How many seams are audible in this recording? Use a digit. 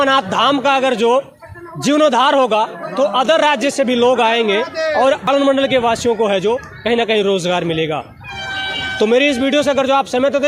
0